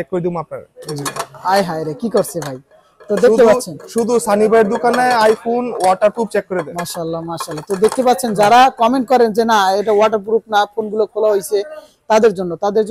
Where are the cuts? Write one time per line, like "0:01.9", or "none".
none